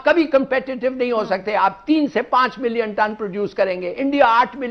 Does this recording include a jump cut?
no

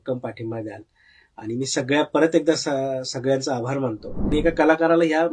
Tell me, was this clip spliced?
yes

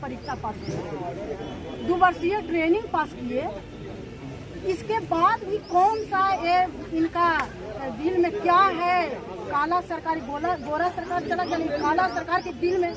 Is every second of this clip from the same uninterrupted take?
yes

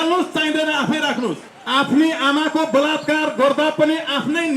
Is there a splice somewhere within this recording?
yes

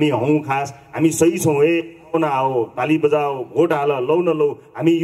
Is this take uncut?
yes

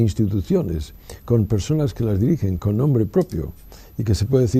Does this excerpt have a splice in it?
no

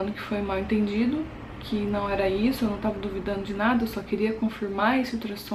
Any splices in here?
no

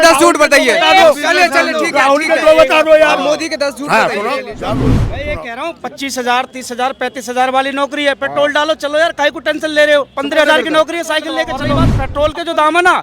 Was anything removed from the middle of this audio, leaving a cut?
yes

